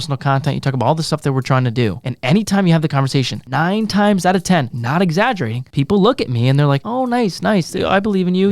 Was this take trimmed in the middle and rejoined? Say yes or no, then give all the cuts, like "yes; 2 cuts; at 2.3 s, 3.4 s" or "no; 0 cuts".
yes; 5 cuts; at 2.1 s, 3.4 s, 4.8 s, 5.6 s, 6.9 s